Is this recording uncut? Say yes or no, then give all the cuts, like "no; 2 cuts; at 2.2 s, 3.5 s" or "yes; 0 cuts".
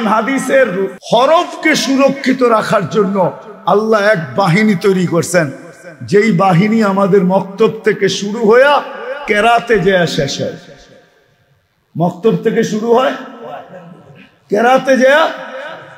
no; 1 cut; at 0.9 s